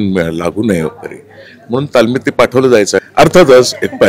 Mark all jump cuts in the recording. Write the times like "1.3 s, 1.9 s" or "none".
3.1 s